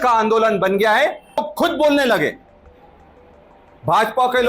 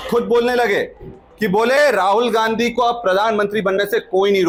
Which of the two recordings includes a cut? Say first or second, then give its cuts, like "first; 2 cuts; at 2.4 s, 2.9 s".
first; 1 cut; at 1.4 s